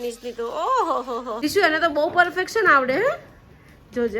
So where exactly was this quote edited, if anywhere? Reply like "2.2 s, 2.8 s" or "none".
1.3 s

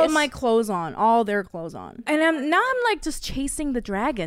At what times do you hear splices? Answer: 2.1 s

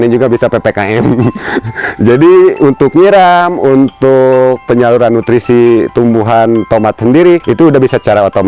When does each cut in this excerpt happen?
7.5 s

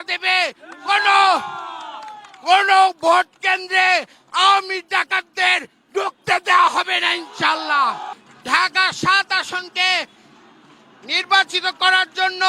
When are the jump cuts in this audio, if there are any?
8.3 s

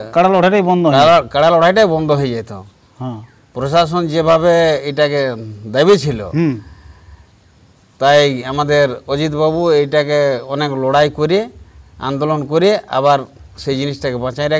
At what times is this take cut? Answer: none

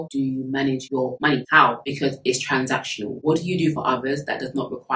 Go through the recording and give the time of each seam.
1.8 s

